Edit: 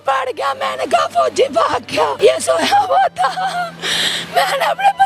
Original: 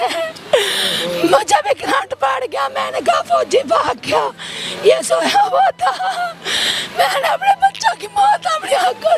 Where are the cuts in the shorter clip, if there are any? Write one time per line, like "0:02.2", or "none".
0:02.1